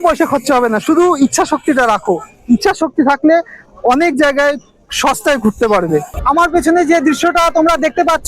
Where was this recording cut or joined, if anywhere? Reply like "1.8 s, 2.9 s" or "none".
6.1 s